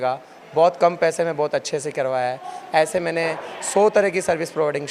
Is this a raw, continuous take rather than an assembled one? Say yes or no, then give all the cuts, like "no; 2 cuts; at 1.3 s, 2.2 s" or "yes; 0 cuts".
yes; 0 cuts